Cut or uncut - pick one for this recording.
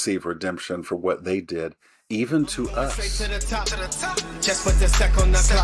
cut